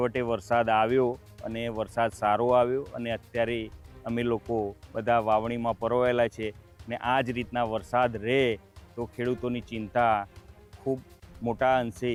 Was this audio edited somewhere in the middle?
no; 0 cuts

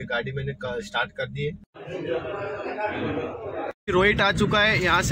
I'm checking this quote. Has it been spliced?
yes; 2 cuts; at 1.7 s, 3.7 s

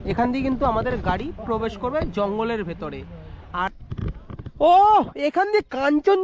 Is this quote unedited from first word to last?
no; 1 cut; at 3.7 s

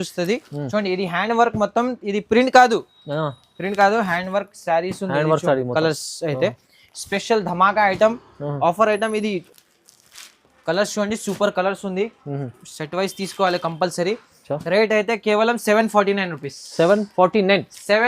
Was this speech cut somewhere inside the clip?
yes; 1 cut; at 9.5 s

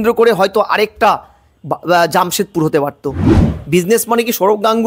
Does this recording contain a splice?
yes; 1 cut; at 3.4 s

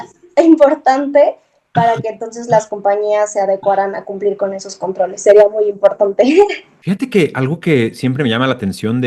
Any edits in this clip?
yes; 1 cut; at 6.7 s

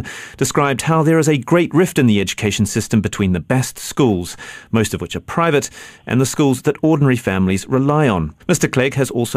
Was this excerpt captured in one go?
yes; 0 cuts

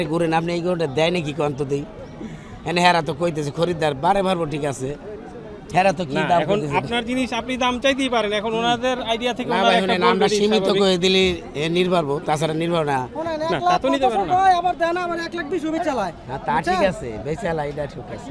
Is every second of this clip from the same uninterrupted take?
yes; 0 cuts

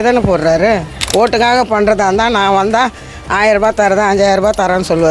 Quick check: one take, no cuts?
no; 1 cut; at 1.0 s

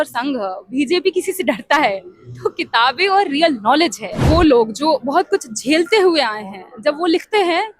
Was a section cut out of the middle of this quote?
yes; 1 cut; at 4.2 s

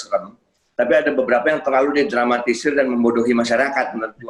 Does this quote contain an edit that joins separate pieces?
no; 0 cuts

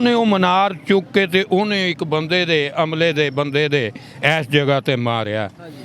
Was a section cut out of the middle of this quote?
no; 0 cuts

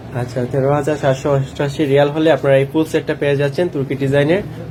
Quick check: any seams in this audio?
no; 0 cuts

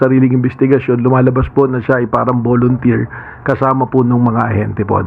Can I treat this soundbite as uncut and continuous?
yes; 0 cuts

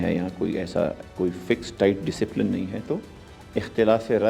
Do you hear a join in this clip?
yes; 1 cut; at 1.0 s

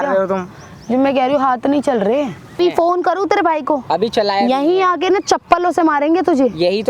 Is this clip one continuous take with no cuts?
no; 1 cut; at 2.5 s

